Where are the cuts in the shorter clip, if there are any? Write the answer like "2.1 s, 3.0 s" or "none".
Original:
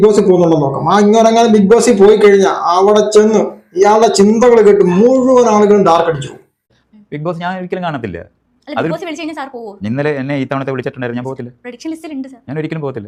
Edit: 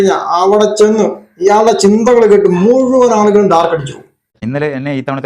4.3 s